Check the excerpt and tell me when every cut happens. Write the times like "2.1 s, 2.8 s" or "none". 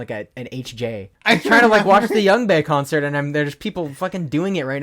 1.1 s